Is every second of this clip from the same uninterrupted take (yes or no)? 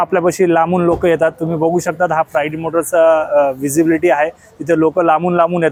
yes